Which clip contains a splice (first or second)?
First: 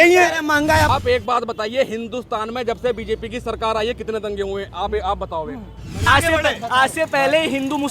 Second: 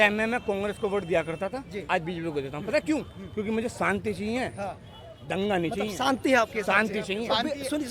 first